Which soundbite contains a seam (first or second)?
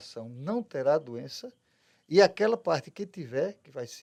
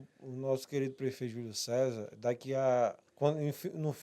second